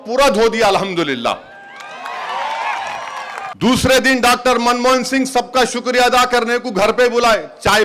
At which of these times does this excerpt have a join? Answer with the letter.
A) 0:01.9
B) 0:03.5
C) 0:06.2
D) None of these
B